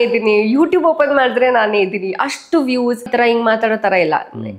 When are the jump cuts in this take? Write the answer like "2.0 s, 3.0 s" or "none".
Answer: 3.1 s